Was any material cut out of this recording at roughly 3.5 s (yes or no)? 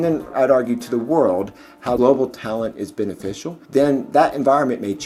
yes